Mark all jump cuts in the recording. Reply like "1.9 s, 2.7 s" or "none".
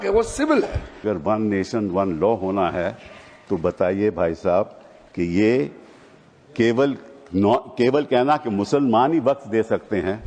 1.0 s